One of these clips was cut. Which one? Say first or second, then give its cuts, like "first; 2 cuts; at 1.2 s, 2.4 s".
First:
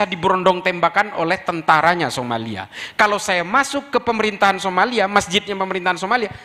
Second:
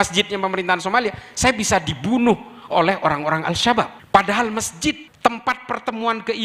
second; 2 cuts; at 4.0 s, 5.1 s